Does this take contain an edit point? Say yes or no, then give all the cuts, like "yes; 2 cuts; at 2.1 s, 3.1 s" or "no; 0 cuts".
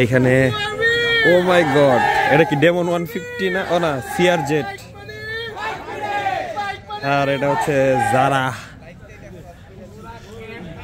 no; 0 cuts